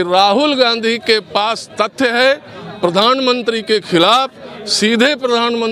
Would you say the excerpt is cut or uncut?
uncut